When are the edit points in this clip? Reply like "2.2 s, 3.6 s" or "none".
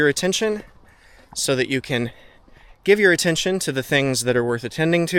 none